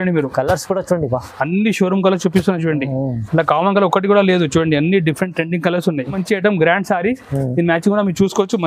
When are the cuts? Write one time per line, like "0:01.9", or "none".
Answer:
0:06.2